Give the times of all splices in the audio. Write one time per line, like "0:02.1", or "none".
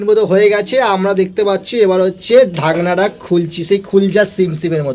none